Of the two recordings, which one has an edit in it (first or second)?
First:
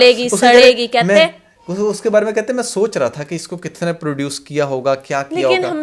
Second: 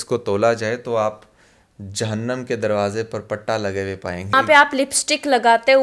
second